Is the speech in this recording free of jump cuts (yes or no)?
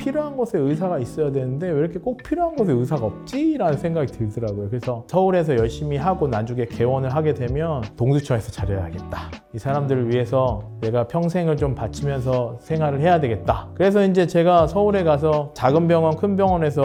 yes